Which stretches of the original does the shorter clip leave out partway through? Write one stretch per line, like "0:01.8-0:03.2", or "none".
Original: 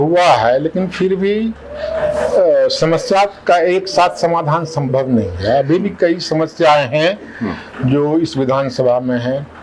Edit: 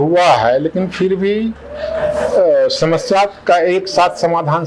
none

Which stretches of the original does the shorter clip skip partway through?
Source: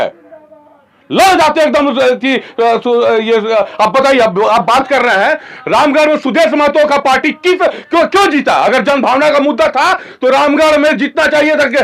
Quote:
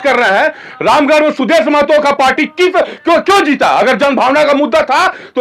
none

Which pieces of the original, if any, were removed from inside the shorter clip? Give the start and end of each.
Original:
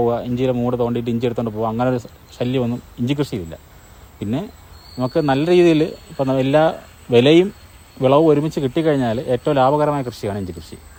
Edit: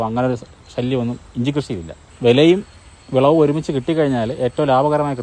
0:03.7-0:06.9

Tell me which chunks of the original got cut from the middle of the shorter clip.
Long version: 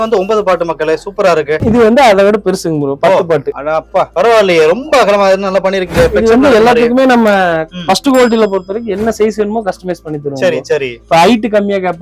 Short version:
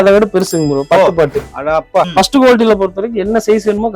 0:03.9-0:07.5

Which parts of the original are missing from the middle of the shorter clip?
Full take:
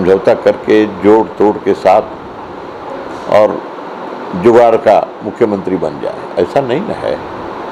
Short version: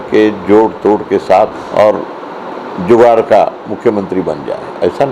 0:02.2-0:03.2

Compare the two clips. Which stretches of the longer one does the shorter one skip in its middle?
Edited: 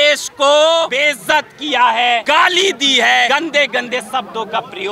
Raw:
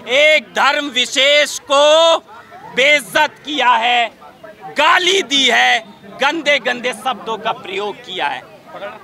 0:02.2-0:02.8
0:04.1-0:04.7
0:05.8-0:06.2

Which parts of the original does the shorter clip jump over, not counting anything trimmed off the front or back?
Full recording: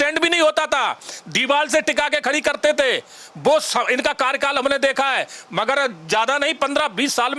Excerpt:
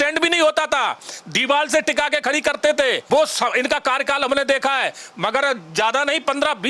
0:03.0-0:03.3

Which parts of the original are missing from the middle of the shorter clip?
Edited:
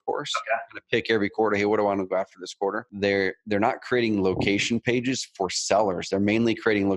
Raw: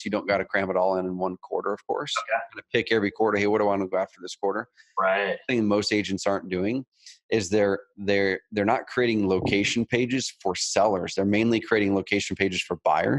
0:04.7-0:07.9

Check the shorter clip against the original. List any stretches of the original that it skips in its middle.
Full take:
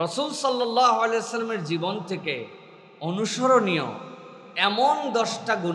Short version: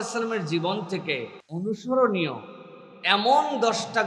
0:02.6-0:02.9

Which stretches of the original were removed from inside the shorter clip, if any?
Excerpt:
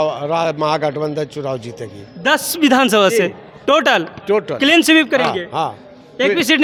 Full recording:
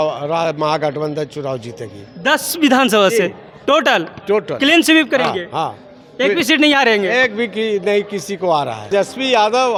none

